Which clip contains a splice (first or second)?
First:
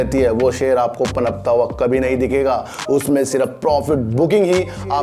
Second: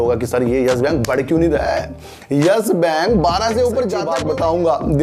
second